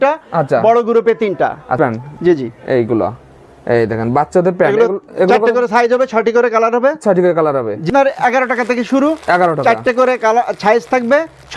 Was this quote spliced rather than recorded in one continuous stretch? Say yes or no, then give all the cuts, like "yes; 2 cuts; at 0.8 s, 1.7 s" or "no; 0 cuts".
yes; 2 cuts; at 1.7 s, 7.9 s